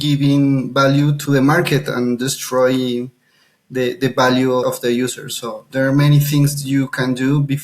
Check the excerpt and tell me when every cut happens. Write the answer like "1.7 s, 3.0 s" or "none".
1.2 s, 4.6 s